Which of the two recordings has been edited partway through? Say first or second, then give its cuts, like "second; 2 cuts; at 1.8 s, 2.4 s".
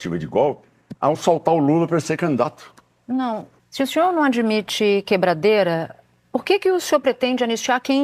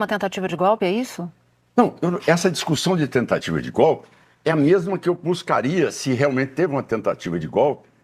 first; 1 cut; at 3.6 s